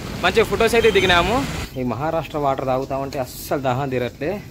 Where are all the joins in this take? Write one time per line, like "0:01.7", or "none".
0:01.6